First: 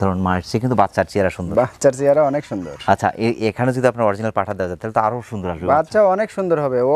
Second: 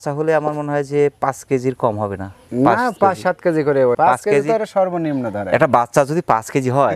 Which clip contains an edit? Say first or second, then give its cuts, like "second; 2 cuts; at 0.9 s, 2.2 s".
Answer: second; 1 cut; at 4.0 s